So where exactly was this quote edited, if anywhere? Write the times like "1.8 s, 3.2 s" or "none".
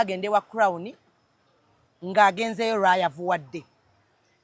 none